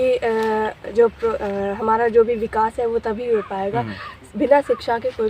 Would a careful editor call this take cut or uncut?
uncut